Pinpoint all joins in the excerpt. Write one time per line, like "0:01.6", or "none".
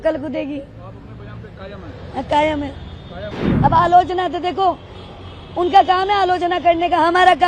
0:03.4